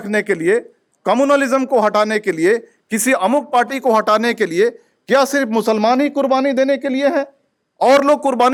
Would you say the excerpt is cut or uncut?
uncut